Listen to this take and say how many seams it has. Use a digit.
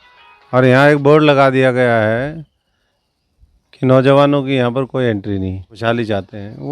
1